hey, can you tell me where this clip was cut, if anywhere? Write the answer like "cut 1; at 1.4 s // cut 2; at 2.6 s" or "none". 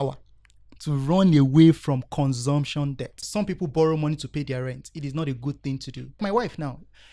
cut 1; at 3.2 s // cut 2; at 6.2 s